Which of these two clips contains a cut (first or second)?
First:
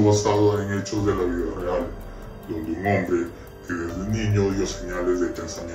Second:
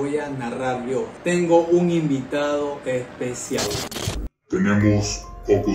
second